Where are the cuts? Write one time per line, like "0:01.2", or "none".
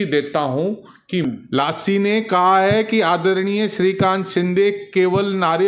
0:01.2